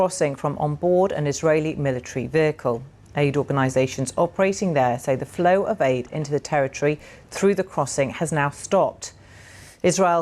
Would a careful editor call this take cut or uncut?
cut